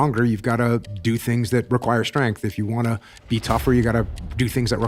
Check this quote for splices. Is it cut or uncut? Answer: uncut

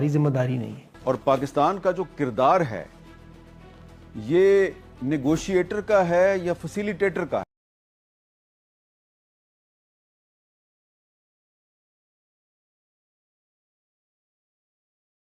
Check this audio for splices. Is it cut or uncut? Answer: uncut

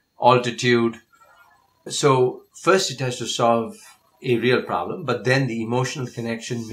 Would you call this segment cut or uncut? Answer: uncut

